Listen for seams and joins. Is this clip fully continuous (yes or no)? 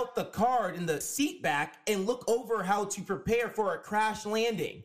no